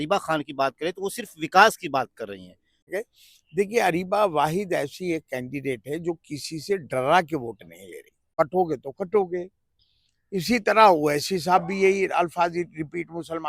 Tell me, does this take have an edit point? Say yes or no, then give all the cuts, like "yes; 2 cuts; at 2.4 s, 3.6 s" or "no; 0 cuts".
yes; 2 cuts; at 2.9 s, 8.3 s